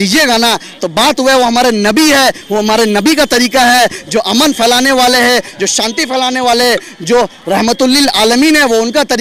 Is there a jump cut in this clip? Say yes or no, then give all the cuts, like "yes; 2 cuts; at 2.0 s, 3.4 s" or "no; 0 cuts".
no; 0 cuts